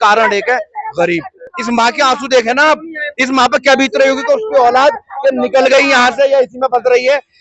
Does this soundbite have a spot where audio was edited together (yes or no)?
no